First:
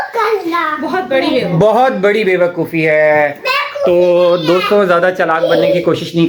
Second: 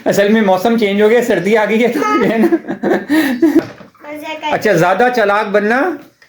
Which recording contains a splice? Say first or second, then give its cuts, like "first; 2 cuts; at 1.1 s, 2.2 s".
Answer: second; 1 cut; at 3.6 s